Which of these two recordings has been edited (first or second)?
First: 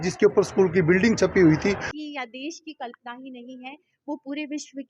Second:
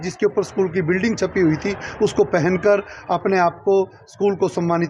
first